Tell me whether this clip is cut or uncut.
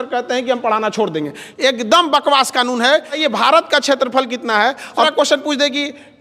cut